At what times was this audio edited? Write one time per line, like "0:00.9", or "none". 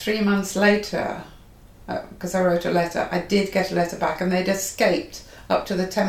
none